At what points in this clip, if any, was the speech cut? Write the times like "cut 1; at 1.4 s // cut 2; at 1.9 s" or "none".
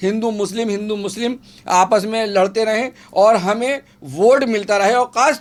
none